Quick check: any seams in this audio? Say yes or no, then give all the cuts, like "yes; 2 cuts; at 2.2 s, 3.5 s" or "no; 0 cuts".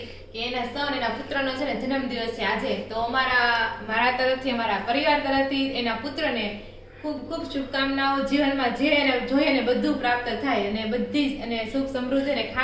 no; 0 cuts